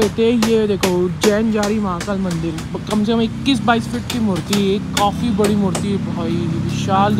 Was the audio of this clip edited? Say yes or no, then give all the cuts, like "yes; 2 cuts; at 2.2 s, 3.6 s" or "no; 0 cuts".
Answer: no; 0 cuts